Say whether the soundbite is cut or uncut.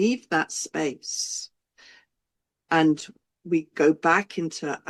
uncut